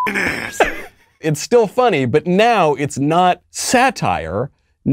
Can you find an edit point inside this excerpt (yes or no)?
yes